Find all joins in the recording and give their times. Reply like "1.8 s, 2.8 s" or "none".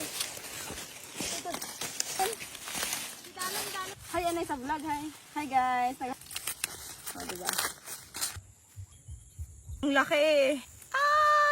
4.0 s, 8.4 s, 9.8 s

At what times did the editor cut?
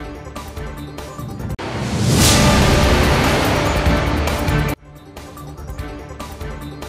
5.9 s

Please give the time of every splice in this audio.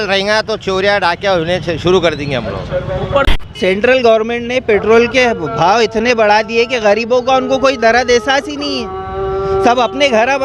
3.3 s

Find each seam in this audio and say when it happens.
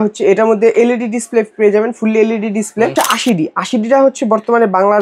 2.9 s

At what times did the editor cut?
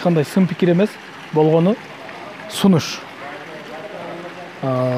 none

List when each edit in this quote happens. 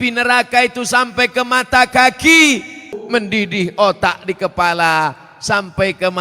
2.9 s

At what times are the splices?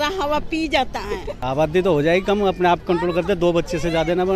1.3 s

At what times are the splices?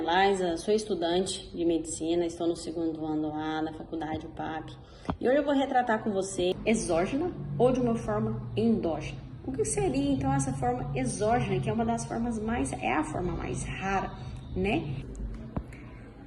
6.5 s, 15.0 s

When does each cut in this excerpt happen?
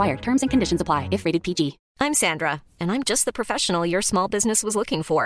1.8 s

